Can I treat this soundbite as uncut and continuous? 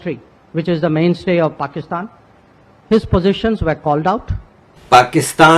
no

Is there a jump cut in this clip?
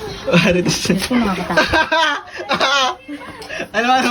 no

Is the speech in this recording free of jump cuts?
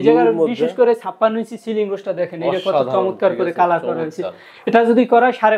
yes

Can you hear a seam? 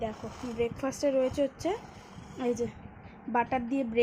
no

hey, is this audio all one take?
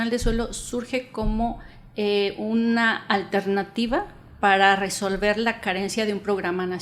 yes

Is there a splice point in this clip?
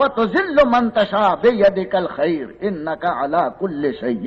no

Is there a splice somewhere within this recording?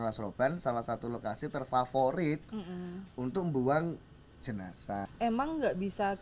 yes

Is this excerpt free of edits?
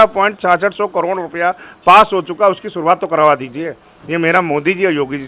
yes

